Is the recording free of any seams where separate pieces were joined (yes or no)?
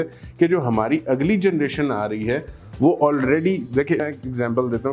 no